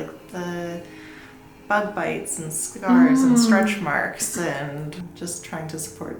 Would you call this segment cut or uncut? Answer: cut